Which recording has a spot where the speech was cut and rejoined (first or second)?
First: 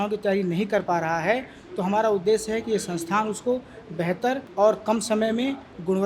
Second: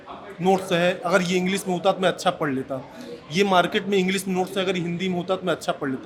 first